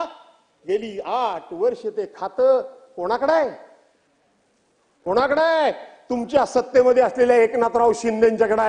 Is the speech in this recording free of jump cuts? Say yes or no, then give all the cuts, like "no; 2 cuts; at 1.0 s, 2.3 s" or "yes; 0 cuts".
yes; 0 cuts